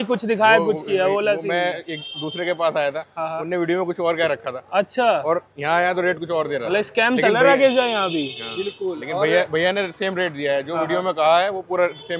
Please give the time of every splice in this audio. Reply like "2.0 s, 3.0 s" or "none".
none